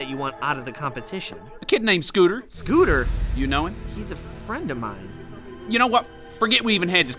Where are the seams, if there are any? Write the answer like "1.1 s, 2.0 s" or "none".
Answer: none